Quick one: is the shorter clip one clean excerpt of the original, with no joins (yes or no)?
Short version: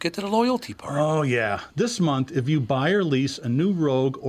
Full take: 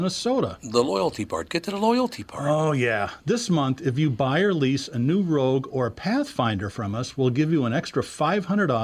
yes